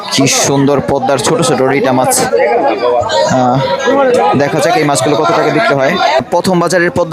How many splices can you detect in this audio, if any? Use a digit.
1